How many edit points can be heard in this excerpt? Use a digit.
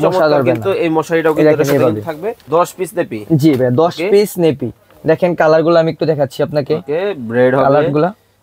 1